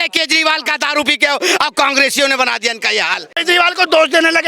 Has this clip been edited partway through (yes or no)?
yes